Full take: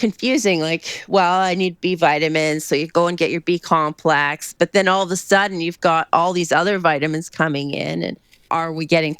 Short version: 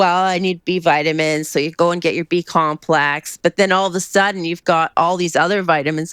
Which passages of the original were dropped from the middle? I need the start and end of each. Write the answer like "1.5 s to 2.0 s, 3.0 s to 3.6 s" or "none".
none